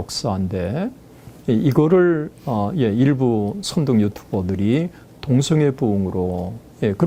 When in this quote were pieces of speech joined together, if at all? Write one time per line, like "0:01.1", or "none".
none